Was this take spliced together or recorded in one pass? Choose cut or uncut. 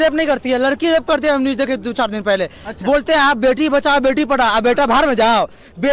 uncut